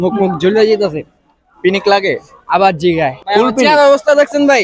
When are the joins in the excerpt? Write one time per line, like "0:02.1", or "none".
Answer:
0:03.3